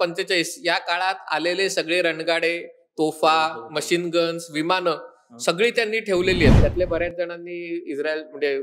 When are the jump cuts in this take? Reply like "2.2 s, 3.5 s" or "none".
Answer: 6.6 s